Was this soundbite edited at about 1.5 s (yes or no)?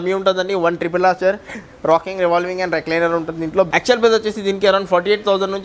no